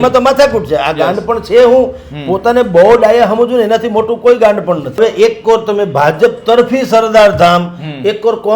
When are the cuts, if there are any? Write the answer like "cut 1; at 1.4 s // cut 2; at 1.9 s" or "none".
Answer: cut 1; at 5.0 s